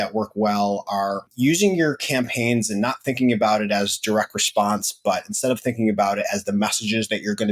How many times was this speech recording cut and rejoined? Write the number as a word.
one